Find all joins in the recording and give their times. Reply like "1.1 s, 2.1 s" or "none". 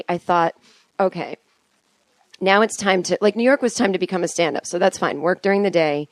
2.2 s